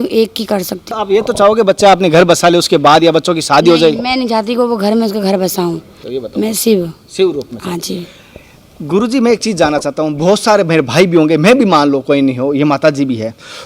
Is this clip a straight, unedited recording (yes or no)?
no